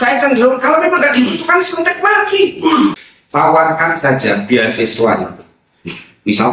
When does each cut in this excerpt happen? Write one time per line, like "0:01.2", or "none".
0:03.1